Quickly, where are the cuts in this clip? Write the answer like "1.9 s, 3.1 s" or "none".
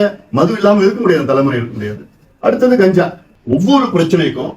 3.3 s